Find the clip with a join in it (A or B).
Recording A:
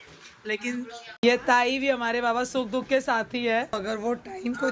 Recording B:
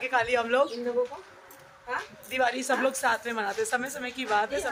A